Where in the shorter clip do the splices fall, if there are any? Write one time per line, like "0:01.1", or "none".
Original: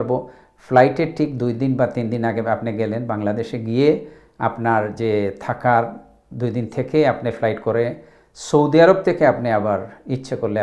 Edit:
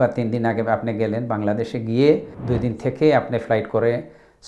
0:02.4